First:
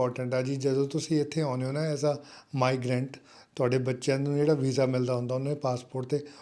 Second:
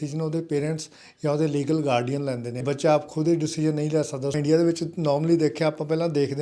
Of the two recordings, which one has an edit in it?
second; 2 cuts; at 2.6 s, 4.4 s

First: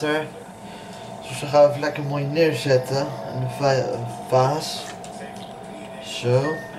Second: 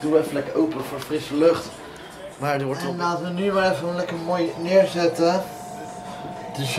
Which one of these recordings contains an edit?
second; 1 cut; at 2.9 s

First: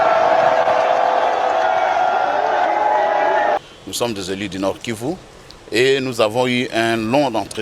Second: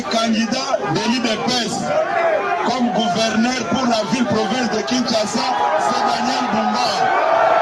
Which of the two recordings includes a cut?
first; 1 cut; at 3.6 s

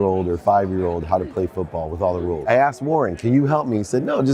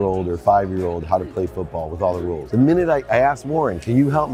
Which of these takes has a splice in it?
first; 1 cut; at 2.4 s

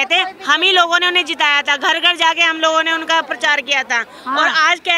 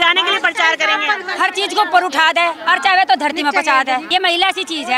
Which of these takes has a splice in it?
second; 2 cuts; at 1.2 s, 4.1 s

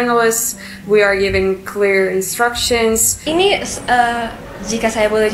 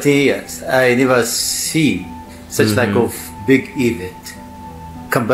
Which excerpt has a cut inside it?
first; 1 cut; at 3.1 s

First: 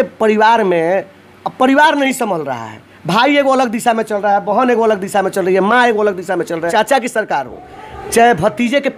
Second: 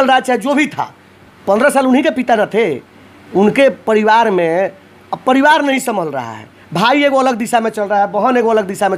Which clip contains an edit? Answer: first; 1 cut; at 6.7 s

